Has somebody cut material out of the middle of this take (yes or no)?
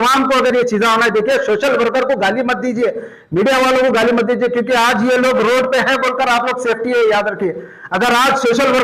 no